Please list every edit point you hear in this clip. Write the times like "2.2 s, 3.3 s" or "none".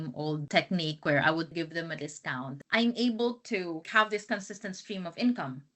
1.5 s, 2.5 s, 3.9 s